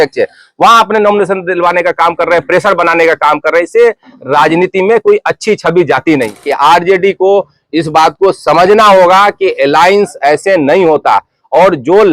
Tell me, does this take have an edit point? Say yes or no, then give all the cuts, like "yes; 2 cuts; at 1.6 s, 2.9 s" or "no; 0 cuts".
yes; 1 cut; at 6.4 s